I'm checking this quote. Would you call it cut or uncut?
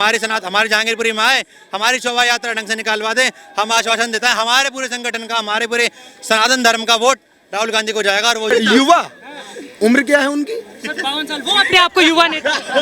cut